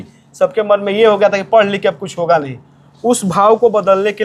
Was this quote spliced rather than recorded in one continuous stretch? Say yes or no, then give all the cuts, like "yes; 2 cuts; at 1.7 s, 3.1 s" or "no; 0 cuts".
no; 0 cuts